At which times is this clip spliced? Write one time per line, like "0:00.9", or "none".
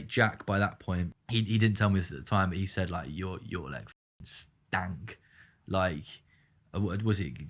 0:01.2